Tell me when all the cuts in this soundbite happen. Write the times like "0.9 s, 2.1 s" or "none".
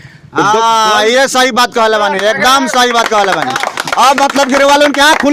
none